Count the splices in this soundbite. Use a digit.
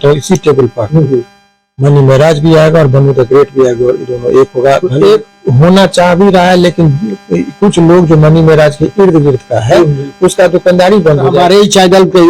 2